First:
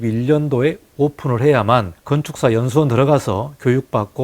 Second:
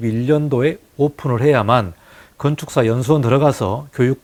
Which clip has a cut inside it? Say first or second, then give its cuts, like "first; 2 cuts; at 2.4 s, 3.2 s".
first; 1 cut; at 2.0 s